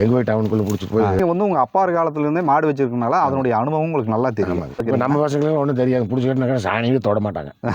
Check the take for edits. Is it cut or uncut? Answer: cut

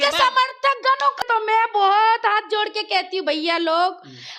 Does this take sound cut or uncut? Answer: cut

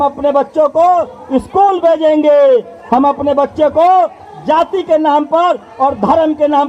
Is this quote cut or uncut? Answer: uncut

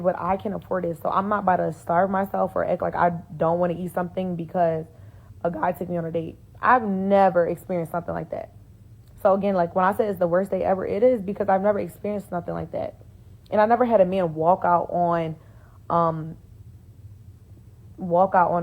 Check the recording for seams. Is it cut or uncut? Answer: uncut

